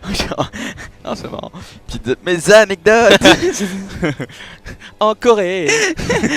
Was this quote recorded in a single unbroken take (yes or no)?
no